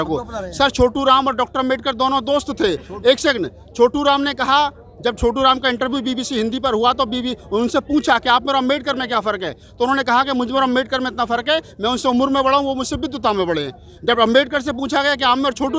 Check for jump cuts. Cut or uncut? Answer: uncut